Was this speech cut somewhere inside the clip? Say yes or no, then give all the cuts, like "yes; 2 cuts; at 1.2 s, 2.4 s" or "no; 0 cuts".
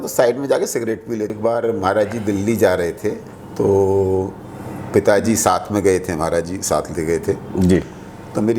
yes; 1 cut; at 1.3 s